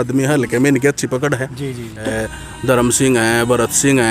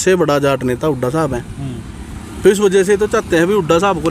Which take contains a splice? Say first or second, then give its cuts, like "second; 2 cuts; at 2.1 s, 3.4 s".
first; 1 cut; at 2.0 s